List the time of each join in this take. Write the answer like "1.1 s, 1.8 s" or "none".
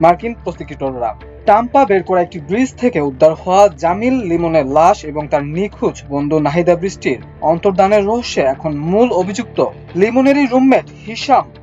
none